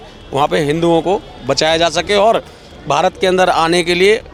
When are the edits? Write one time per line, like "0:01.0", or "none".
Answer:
none